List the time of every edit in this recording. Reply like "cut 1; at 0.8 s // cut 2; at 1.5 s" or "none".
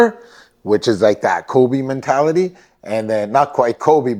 none